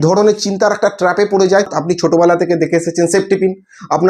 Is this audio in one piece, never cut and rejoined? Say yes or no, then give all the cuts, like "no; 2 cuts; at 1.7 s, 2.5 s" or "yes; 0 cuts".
no; 1 cut; at 1.8 s